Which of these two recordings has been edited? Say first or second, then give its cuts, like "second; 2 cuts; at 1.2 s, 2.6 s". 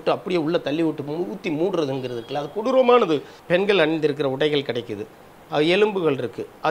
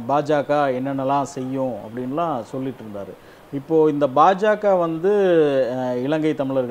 first; 1 cut; at 3.3 s